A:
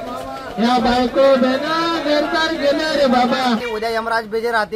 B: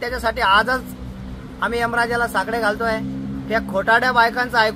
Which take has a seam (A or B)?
A